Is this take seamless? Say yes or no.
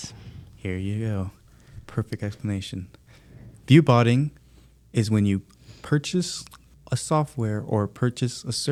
yes